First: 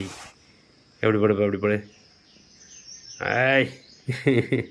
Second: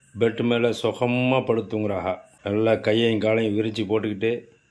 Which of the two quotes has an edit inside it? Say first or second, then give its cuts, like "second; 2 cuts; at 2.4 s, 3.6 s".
second; 1 cut; at 2.3 s